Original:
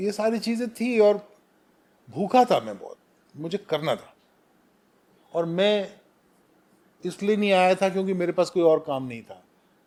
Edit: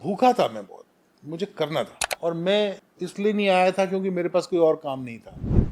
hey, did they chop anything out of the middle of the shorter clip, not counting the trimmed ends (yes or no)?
yes